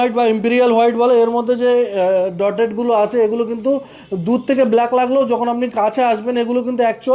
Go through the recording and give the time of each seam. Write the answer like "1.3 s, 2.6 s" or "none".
none